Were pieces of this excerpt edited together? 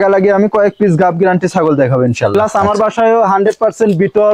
yes; 1 cut; at 2.3 s

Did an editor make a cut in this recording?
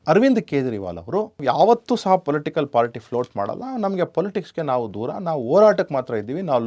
yes; 1 cut; at 1.4 s

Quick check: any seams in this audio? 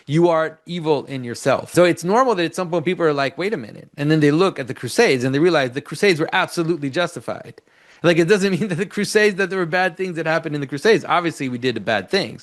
yes; 1 cut; at 1.7 s

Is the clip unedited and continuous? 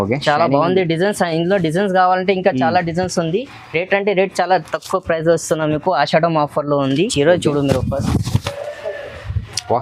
no; 1 cut; at 7.1 s

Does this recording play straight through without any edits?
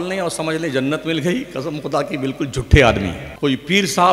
no; 1 cut; at 3.2 s

